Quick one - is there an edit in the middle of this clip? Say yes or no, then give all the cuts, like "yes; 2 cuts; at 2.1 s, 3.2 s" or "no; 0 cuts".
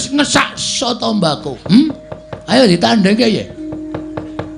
yes; 1 cut; at 1.5 s